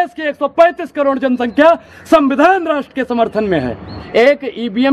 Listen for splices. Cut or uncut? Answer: cut